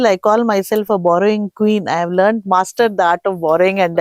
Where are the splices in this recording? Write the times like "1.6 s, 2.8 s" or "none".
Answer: none